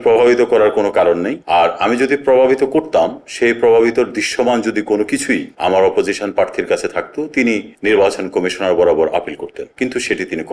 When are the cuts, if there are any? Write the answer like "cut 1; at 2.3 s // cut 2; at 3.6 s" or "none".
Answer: none